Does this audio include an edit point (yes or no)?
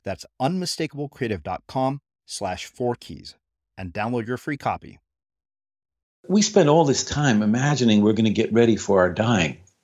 yes